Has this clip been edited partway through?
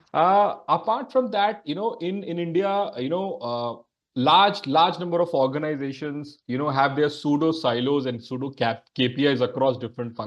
no; 0 cuts

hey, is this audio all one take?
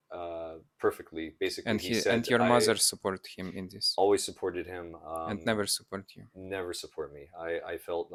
yes; 0 cuts

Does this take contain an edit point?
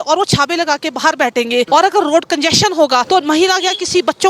yes; 2 cuts; at 1.7 s, 3.1 s

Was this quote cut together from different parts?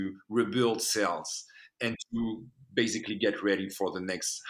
no; 0 cuts

